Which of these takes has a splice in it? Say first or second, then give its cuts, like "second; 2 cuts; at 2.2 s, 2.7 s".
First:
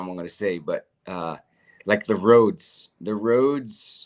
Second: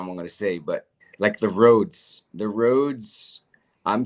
second; 1 cut; at 1.0 s